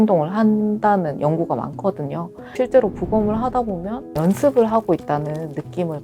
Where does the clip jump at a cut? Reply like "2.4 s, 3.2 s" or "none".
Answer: 2.5 s, 4.1 s